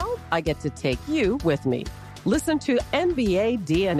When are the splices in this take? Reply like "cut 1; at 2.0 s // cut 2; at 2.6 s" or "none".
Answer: none